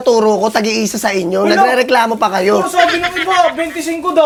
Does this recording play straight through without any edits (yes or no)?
yes